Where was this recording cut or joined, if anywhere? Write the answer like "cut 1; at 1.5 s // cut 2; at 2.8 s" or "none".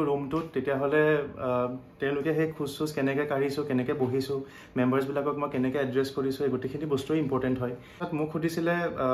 cut 1; at 8.0 s